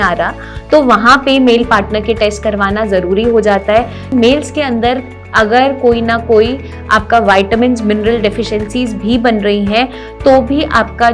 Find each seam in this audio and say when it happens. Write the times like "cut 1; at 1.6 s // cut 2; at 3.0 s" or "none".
cut 1; at 4.1 s